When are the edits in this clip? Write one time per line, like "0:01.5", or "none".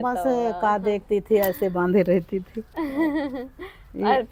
none